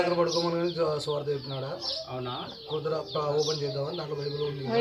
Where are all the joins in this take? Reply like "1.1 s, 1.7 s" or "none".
none